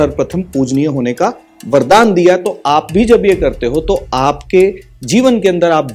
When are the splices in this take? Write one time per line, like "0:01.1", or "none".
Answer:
none